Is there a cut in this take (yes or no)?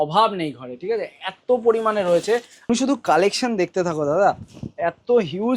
yes